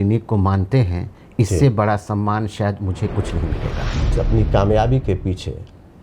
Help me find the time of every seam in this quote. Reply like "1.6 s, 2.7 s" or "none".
4.1 s

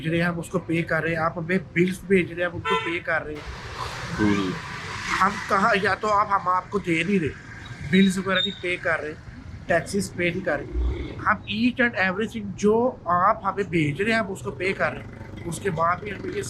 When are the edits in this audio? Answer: none

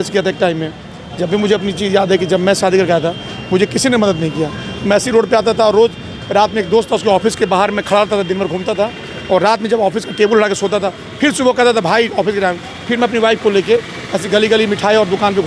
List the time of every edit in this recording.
none

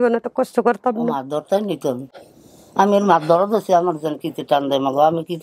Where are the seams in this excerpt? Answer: none

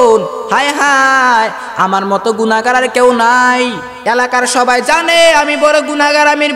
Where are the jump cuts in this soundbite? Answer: 3.9 s

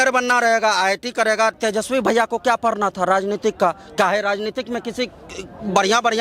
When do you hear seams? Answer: 1.6 s

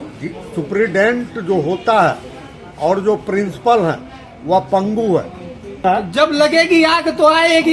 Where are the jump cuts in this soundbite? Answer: 5.8 s

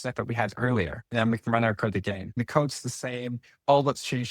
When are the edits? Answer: 1.0 s, 2.4 s

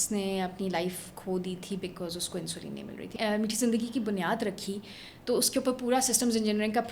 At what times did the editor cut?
3.1 s

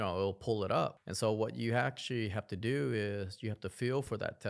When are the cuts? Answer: 1.0 s

